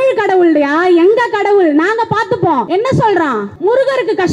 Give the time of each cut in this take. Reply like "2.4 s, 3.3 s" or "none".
2.7 s, 3.5 s